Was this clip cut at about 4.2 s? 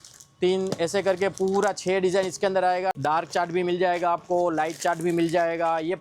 no; 1 cut; at 3.0 s

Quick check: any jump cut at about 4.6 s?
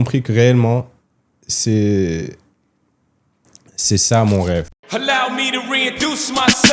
yes; 1 cut; at 4.6 s

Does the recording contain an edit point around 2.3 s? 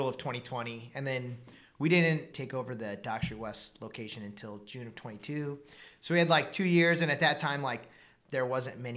yes; 1 cut; at 2.3 s

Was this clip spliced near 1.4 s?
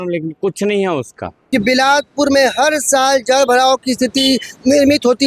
yes; 1 cut; at 1.4 s

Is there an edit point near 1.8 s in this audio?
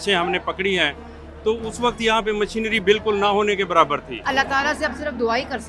no; 1 cut; at 4.1 s

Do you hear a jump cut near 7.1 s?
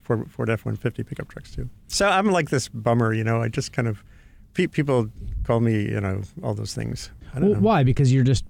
yes; 1 cut; at 7.1 s

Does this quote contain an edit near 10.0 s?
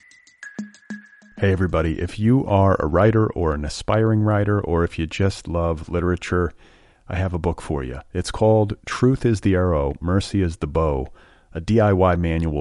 no; 1 cut; at 0.9 s

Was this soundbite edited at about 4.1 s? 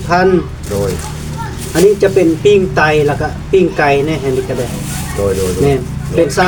no; 0 cuts

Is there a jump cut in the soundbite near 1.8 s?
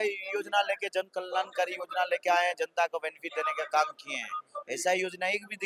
no; 0 cuts

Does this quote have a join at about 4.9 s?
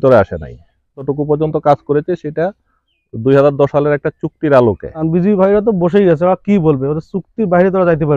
yes; 2 cuts; at 1.1 s, 4.9 s

